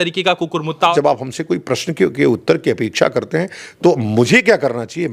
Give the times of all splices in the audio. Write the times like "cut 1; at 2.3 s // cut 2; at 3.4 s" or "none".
cut 1; at 0.9 s